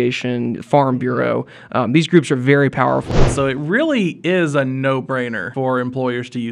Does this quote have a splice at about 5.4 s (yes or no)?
yes